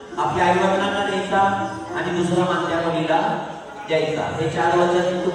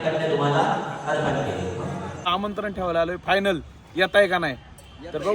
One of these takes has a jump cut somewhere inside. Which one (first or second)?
second